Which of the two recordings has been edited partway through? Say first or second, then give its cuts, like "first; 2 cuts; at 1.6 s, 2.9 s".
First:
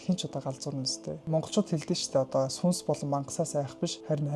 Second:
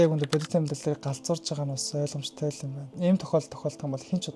first; 1 cut; at 1.2 s